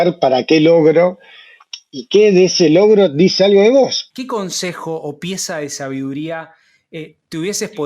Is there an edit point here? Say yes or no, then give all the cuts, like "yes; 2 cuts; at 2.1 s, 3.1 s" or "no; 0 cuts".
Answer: yes; 1 cut; at 4.1 s